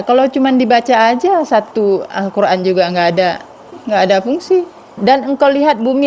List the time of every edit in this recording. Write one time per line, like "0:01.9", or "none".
0:03.8
0:04.9